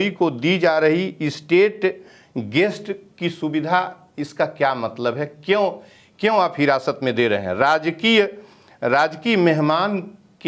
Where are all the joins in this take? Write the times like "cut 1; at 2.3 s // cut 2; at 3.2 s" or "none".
none